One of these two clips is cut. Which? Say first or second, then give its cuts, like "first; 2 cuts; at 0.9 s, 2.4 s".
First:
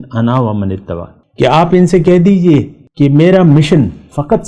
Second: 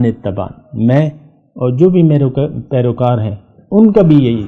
first; 2 cuts; at 1.2 s, 2.8 s